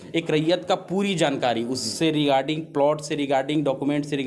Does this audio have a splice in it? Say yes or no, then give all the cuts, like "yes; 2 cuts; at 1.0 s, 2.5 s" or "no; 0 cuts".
no; 0 cuts